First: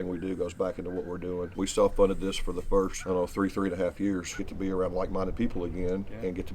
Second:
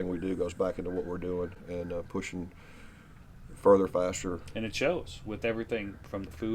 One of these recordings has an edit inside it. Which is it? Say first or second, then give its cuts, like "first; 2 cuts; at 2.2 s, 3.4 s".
first; 3 cuts; at 1.5 s, 3.0 s, 4.4 s